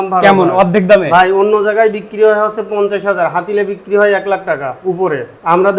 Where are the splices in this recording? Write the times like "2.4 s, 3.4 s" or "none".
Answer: none